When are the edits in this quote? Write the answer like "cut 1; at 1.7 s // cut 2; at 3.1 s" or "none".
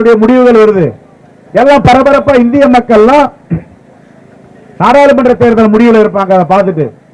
none